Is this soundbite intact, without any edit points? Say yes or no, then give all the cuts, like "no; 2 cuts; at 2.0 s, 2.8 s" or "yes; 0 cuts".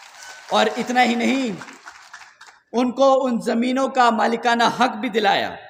yes; 0 cuts